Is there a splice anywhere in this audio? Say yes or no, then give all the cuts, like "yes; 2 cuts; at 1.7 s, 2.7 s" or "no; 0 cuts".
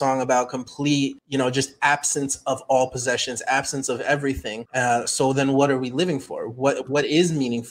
yes; 2 cuts; at 1.2 s, 4.6 s